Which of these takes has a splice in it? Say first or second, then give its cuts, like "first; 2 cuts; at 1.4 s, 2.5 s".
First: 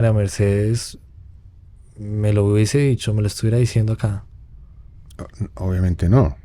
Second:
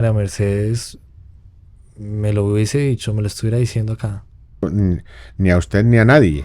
second; 1 cut; at 4.6 s